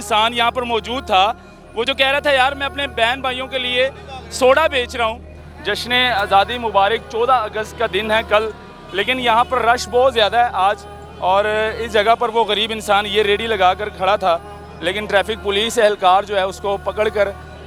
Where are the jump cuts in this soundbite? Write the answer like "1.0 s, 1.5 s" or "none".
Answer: 5.3 s